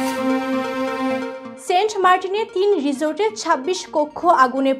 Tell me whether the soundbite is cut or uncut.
cut